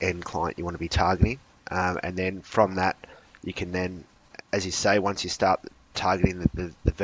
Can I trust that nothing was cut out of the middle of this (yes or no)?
yes